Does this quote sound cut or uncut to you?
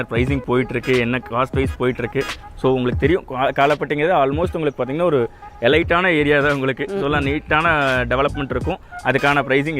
uncut